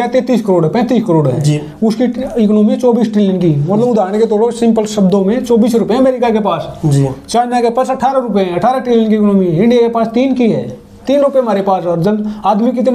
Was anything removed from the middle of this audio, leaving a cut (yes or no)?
no